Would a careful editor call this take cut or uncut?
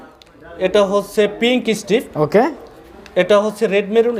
uncut